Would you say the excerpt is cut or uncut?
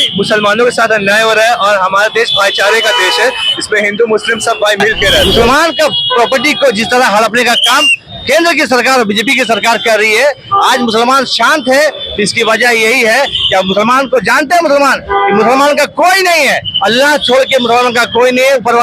cut